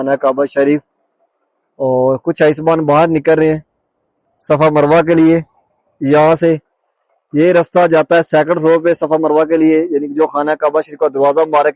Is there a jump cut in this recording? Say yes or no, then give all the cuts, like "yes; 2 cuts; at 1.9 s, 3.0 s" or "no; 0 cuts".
no; 0 cuts